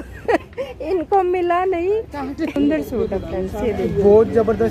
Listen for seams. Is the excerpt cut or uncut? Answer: cut